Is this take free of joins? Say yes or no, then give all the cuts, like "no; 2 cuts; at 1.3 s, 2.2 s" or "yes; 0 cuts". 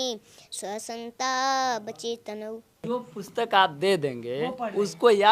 no; 1 cut; at 2.8 s